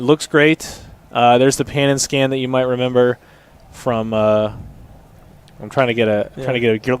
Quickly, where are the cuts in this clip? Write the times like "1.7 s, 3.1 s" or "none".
3.8 s